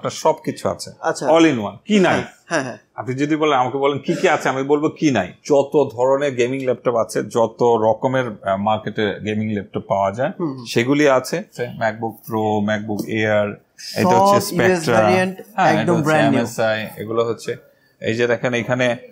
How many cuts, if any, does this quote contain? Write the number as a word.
two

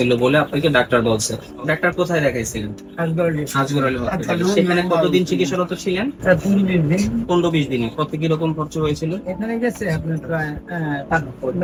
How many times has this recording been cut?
zero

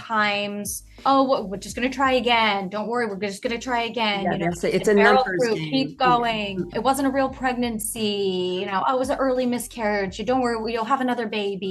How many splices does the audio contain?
two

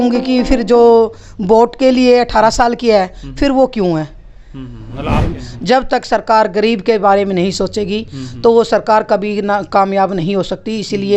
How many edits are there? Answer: one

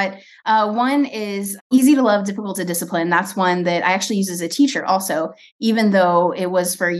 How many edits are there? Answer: one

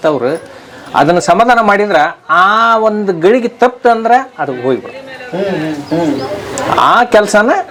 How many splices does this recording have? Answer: zero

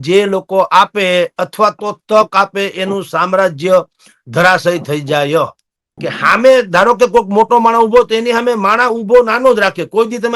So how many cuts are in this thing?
one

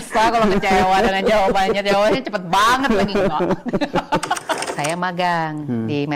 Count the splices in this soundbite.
one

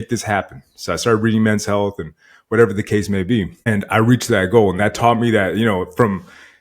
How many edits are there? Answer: one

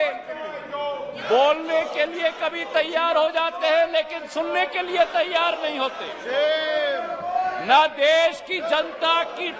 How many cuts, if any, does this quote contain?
zero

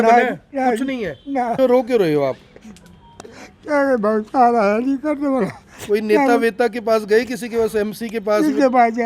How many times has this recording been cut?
one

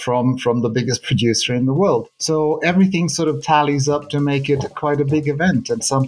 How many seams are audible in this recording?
zero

